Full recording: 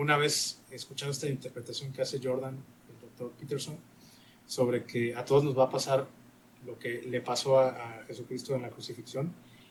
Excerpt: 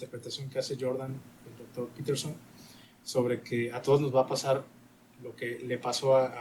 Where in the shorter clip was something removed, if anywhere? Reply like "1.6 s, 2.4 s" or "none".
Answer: none